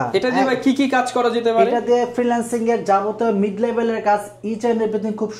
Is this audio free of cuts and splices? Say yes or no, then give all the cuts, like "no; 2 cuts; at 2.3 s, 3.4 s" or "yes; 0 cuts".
yes; 0 cuts